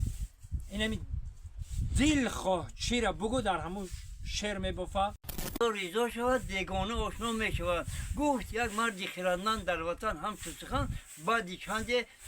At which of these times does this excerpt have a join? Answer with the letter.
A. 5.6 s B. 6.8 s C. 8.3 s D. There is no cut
A